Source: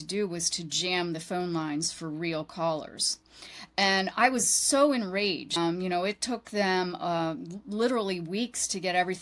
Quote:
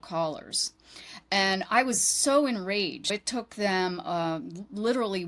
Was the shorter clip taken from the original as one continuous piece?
no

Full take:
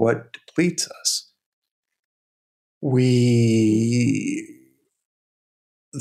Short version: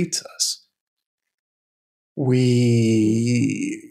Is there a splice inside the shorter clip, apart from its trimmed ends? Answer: no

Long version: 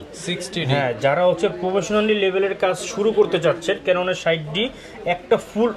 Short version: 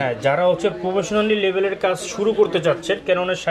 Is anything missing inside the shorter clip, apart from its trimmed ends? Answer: no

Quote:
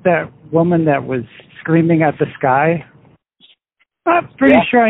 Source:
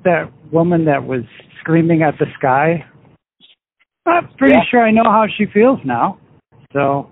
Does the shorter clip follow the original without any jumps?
yes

